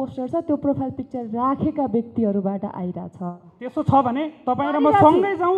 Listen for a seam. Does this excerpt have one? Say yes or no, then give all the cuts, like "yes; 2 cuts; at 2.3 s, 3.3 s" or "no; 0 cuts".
no; 0 cuts